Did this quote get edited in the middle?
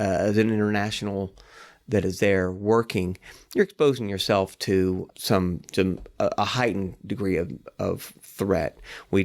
no; 0 cuts

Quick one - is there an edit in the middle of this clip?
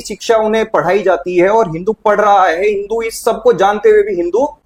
no; 0 cuts

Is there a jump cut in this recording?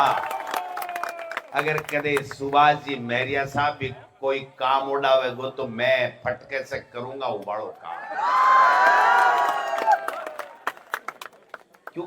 no; 0 cuts

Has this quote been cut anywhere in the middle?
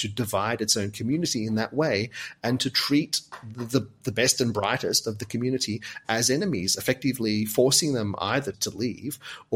yes; 1 cut; at 8.6 s

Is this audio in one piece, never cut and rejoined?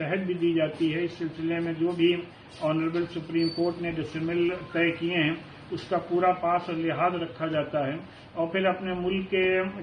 yes; 0 cuts

